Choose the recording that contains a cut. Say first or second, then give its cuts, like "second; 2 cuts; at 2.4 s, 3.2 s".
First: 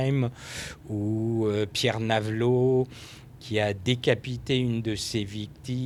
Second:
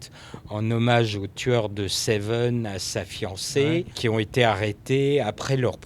second; 1 cut; at 3.9 s